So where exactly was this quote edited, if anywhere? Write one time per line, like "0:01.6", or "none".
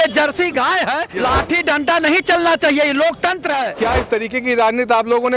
0:01.2
0:03.7